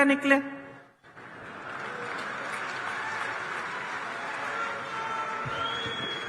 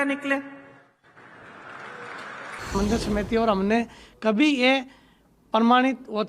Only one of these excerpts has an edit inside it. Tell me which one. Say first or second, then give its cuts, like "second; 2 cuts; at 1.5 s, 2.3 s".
second; 1 cut; at 2.8 s